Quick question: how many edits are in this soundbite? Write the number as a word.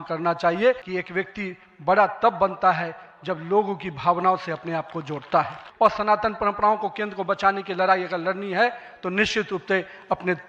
two